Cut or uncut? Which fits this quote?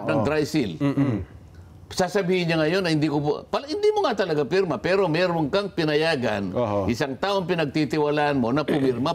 uncut